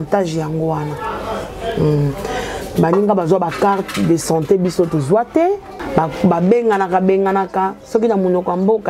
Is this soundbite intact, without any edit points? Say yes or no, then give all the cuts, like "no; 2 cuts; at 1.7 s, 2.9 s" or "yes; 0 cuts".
no; 1 cut; at 5.8 s